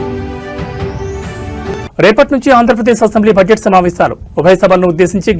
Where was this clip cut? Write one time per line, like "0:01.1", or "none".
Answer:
0:01.5